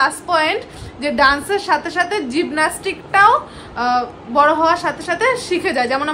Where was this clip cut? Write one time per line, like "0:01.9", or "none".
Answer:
none

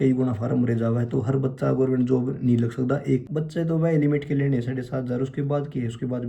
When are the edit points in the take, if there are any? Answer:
0:03.2

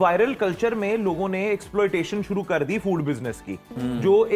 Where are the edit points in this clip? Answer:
none

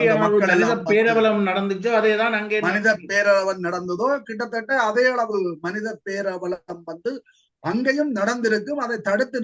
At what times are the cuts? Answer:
none

